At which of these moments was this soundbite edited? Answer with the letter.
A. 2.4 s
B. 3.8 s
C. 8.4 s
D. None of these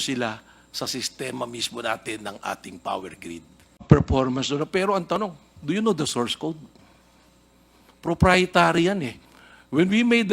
B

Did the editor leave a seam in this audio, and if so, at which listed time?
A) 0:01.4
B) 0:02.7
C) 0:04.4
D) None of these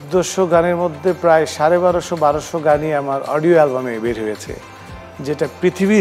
D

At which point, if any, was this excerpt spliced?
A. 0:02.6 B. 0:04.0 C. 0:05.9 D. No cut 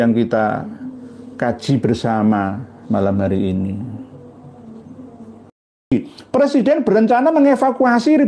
C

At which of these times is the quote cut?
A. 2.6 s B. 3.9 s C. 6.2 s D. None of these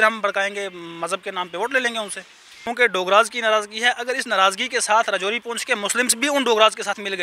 A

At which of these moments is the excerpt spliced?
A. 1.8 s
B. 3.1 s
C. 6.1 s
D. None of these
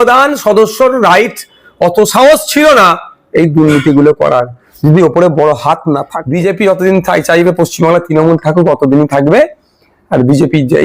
C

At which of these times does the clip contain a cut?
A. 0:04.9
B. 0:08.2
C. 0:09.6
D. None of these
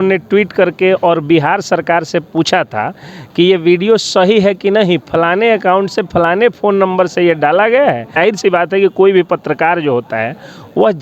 B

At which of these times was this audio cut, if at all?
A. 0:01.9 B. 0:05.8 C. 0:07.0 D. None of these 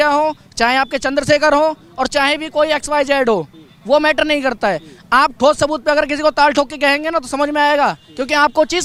D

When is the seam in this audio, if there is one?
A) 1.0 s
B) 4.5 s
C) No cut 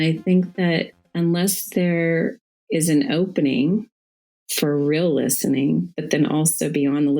A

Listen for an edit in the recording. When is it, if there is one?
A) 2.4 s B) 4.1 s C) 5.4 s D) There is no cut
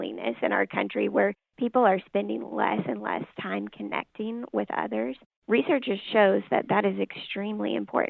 C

